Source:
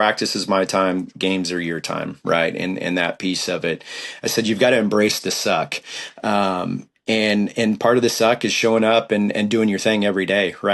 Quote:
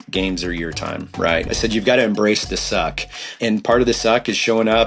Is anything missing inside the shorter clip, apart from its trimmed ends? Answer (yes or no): yes